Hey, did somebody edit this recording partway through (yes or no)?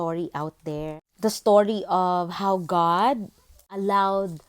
yes